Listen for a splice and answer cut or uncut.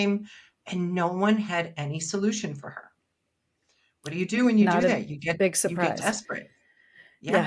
uncut